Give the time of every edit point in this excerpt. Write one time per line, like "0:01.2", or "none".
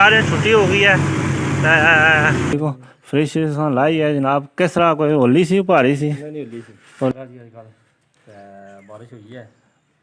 0:02.5
0:07.1